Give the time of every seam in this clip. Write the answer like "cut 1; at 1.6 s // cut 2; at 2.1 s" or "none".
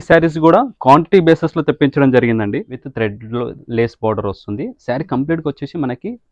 cut 1; at 2.8 s